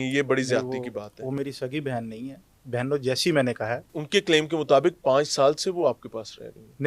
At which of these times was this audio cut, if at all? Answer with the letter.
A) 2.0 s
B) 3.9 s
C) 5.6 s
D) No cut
B